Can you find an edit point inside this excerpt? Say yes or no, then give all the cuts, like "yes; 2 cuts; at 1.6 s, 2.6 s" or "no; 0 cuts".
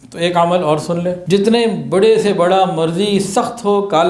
yes; 1 cut; at 1.2 s